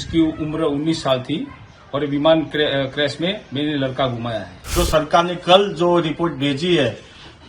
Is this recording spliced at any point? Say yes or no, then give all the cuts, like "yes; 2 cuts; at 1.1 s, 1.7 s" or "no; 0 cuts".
yes; 1 cut; at 4.7 s